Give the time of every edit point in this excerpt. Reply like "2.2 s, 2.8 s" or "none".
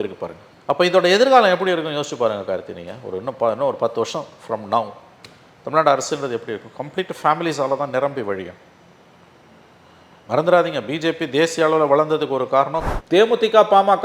12.8 s